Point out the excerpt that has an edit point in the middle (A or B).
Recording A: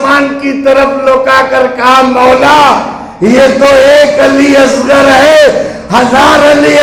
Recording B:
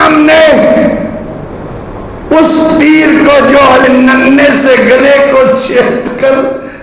B